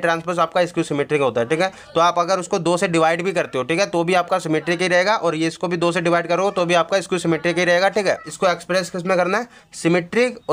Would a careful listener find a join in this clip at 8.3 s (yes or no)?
yes